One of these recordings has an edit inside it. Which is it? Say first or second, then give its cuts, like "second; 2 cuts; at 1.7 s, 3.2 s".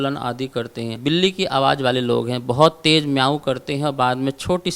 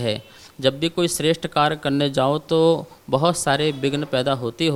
first; 1 cut; at 1.0 s